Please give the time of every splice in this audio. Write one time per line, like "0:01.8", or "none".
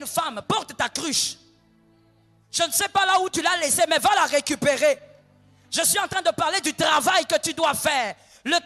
none